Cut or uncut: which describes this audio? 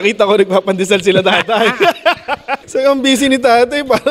cut